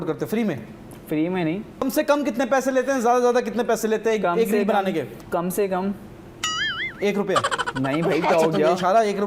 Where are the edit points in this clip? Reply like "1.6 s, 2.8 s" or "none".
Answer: 1.8 s